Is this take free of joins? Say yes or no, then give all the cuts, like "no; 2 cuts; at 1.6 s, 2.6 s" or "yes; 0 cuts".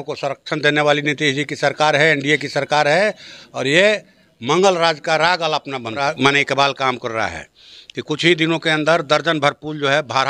no; 1 cut; at 6.0 s